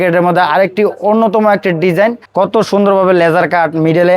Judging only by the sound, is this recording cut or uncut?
cut